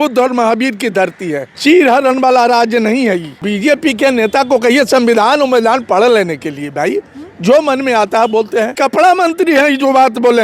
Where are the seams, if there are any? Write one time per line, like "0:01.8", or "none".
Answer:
0:01.6
0:03.4
0:08.7

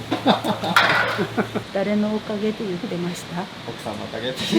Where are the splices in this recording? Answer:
0:01.6

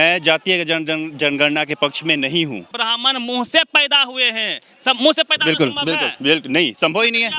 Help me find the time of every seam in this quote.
0:02.7

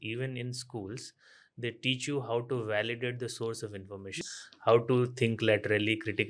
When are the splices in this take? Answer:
0:04.2

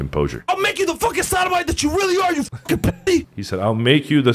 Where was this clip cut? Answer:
0:03.4

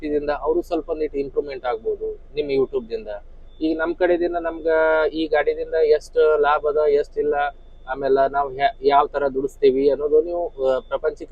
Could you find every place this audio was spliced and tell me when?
none

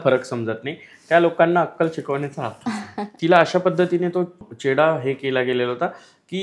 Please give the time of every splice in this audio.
0:03.1
0:04.4

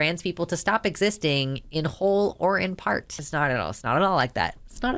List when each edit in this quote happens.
0:03.2

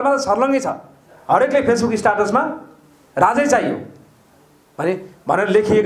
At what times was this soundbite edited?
none

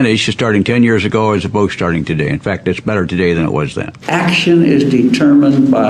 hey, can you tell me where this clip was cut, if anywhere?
0:03.9

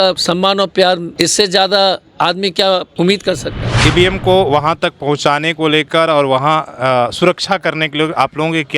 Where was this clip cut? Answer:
0:01.1
0:02.9
0:03.8

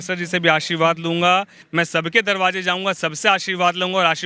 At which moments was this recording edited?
0:01.6

